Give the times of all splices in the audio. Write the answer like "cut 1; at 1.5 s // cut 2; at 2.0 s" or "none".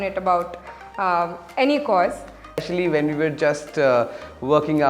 cut 1; at 2.6 s